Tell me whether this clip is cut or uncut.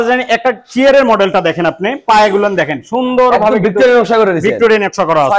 uncut